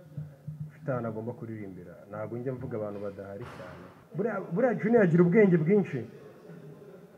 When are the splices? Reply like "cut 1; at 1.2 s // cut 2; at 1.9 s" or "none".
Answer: cut 1; at 4.0 s

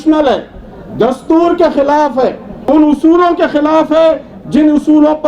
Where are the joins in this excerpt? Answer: cut 1; at 2.5 s

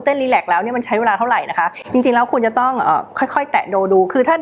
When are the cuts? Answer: none

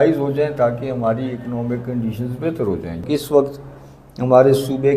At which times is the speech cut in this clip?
cut 1; at 3.0 s

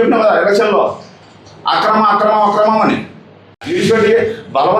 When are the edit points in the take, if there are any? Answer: none

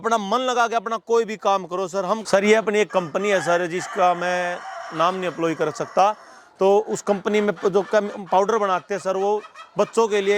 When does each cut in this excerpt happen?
cut 1; at 2.2 s

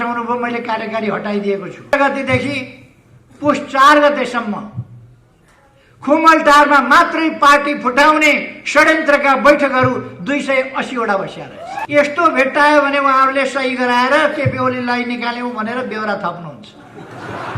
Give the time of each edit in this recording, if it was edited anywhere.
cut 1; at 1.9 s // cut 2; at 11.8 s

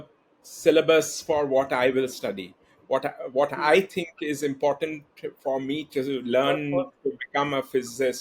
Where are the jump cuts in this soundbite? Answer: none

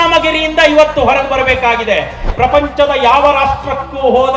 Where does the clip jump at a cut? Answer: cut 1; at 2.2 s

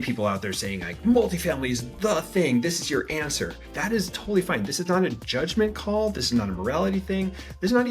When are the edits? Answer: cut 1; at 3.7 s

